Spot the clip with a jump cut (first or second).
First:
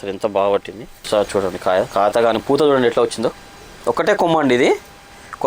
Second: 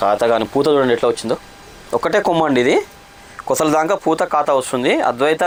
first